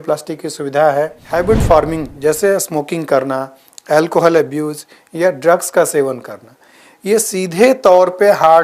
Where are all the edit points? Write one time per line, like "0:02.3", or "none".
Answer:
0:01.2